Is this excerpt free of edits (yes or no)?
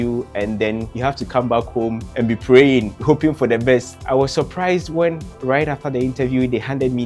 no